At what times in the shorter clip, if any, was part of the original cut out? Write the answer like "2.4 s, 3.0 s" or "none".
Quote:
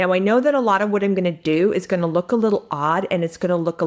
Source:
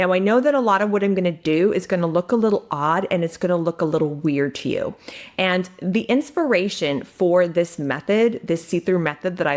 none